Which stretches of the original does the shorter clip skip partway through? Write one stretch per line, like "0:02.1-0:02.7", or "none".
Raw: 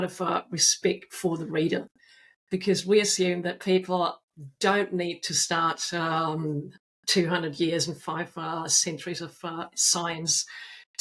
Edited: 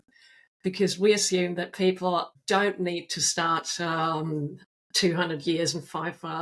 0:04.2-0:04.5